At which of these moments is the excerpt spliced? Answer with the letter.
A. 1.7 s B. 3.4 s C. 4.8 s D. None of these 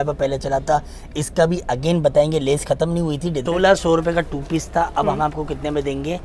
B